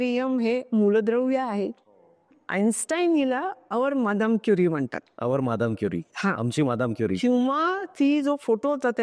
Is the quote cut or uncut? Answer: cut